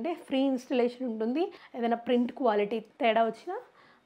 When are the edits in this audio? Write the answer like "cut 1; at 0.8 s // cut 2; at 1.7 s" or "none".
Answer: cut 1; at 1.6 s // cut 2; at 2.9 s